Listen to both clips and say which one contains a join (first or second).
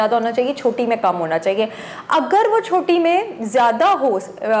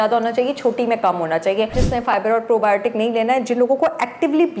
second